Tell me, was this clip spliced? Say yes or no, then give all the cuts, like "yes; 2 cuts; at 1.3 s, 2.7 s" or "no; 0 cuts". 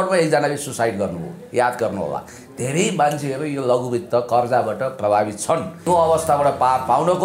yes; 1 cut; at 5.8 s